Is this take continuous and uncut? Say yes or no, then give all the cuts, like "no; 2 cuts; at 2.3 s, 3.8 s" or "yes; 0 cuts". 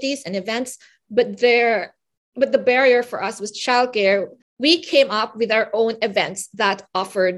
no; 1 cut; at 4.4 s